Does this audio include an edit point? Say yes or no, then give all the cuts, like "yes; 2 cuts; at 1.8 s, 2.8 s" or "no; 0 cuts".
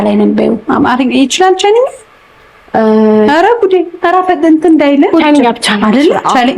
yes; 1 cut; at 5.1 s